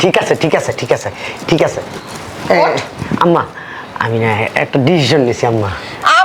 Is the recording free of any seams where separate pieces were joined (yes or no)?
yes